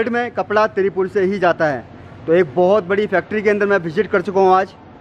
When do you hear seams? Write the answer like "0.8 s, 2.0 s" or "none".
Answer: none